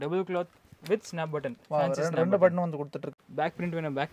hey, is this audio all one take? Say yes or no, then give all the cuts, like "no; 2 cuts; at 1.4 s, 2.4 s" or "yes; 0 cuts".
no; 1 cut; at 3.1 s